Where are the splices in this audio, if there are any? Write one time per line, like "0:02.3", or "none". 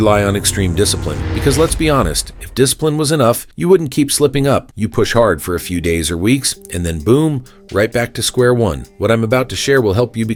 none